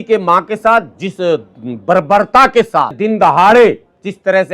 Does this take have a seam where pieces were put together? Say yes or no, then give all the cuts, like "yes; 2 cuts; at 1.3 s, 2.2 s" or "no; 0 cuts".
yes; 1 cut; at 3.0 s